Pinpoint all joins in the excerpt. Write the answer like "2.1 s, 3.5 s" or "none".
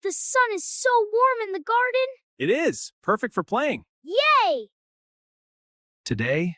2.2 s, 3.9 s